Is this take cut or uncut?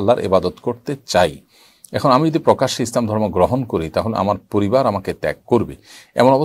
uncut